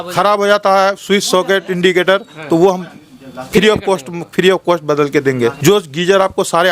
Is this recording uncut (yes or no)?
no